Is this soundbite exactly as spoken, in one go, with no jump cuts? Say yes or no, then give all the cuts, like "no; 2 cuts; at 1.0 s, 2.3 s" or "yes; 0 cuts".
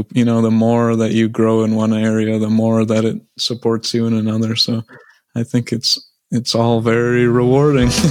yes; 0 cuts